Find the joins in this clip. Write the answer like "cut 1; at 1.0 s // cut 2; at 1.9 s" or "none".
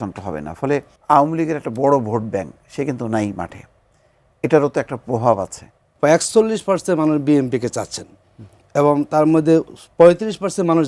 cut 1; at 0.9 s // cut 2; at 5.8 s